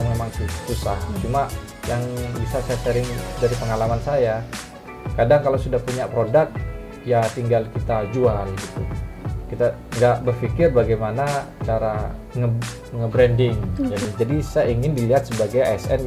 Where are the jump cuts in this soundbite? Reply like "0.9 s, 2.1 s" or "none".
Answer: 14.0 s